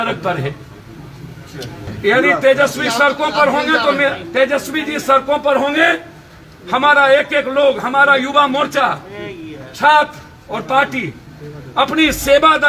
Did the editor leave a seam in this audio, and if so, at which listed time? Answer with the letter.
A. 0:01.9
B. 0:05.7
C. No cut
A